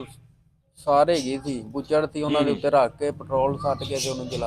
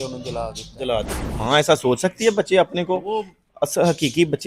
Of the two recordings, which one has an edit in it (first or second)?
second